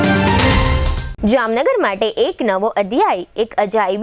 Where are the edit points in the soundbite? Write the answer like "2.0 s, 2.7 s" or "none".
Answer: 1.0 s